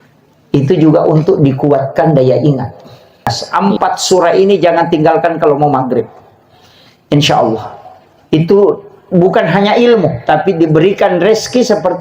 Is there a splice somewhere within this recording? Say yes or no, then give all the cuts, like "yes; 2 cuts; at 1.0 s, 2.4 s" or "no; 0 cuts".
yes; 1 cut; at 3.4 s